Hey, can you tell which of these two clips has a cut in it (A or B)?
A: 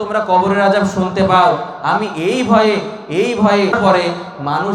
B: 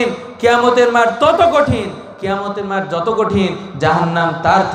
A